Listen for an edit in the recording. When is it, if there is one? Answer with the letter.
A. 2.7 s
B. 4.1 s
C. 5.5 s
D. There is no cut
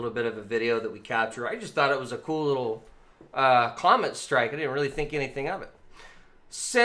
B